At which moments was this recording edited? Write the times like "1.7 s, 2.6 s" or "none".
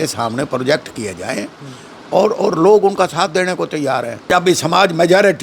4.3 s